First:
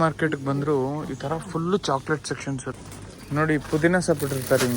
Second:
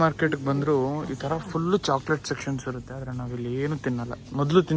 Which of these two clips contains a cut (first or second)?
first